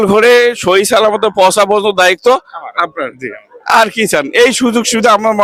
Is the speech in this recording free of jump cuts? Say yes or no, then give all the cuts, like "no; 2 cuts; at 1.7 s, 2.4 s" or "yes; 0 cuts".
yes; 0 cuts